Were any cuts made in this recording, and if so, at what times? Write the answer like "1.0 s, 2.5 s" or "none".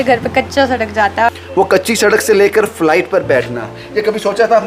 1.3 s